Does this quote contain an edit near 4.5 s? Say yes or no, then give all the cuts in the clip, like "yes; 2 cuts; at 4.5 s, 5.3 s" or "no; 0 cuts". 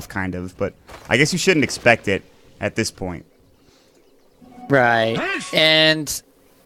yes; 1 cut; at 4.5 s